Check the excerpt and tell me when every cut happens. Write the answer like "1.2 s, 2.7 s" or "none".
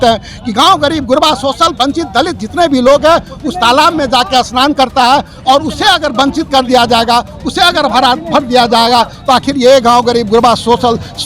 none